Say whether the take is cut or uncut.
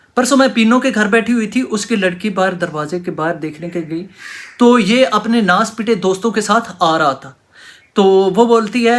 uncut